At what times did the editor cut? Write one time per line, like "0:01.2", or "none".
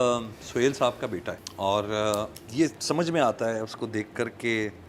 0:01.4
0:02.4

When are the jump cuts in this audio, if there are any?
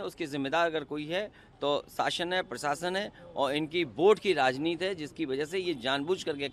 none

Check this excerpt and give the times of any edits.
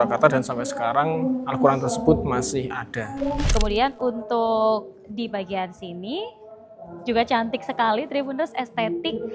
0:03.4

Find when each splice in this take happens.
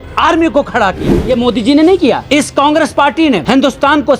0:01.1
0:02.2
0:03.4

